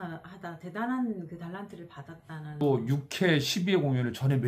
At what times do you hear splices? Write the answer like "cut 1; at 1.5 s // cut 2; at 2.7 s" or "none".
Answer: cut 1; at 2.6 s